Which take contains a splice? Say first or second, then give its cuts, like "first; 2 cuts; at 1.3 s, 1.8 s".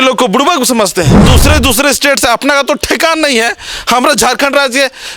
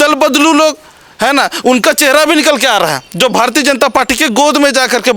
first; 1 cut; at 1.2 s